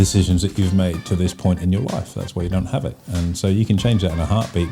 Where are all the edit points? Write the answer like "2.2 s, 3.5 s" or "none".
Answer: none